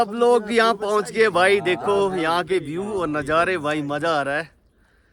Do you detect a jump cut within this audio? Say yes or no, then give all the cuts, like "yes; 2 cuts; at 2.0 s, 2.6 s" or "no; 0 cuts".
no; 0 cuts